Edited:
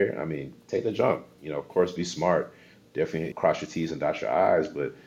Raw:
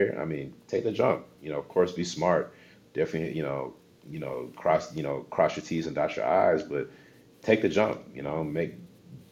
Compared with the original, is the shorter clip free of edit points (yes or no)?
no